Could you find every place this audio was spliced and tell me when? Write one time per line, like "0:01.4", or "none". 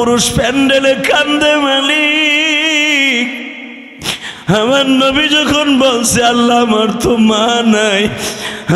none